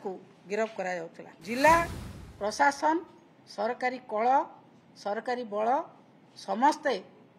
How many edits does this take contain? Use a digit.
1